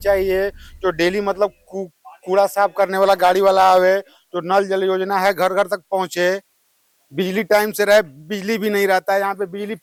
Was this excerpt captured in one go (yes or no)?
yes